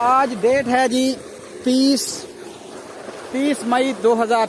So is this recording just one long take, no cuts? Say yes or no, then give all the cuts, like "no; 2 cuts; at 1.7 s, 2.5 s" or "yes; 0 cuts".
yes; 0 cuts